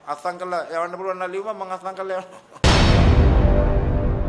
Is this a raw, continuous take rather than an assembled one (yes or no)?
no